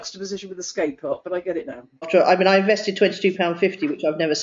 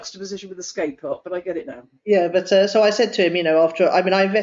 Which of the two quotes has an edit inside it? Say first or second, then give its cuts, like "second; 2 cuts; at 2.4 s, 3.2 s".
first; 1 cut; at 2.1 s